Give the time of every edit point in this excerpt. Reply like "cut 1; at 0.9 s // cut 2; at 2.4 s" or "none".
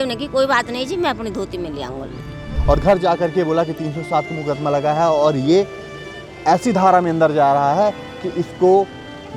cut 1; at 2.5 s